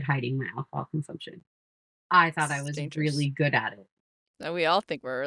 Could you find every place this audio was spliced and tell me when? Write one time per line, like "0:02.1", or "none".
none